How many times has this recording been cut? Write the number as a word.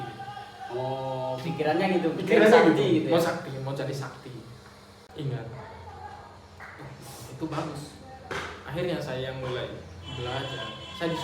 one